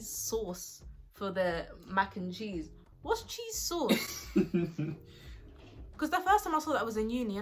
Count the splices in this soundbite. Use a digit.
0